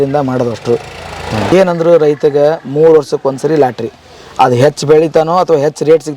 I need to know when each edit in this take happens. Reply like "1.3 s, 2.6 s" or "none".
1.5 s